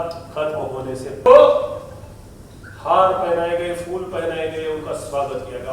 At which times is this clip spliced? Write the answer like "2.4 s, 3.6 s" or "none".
1.3 s